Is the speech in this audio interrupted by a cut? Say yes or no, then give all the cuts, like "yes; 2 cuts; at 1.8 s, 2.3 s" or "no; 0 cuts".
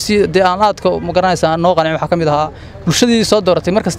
no; 0 cuts